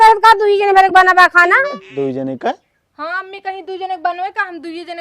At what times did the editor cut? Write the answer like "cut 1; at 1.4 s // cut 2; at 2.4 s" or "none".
cut 1; at 1.8 s